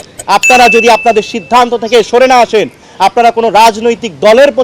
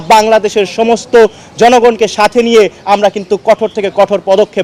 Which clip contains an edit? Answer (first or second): first